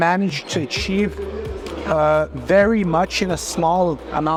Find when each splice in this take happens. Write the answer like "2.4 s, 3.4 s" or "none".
none